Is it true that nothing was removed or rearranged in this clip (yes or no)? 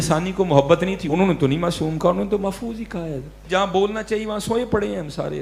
no